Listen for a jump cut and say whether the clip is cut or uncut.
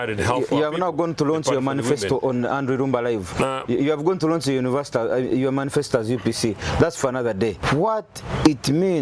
cut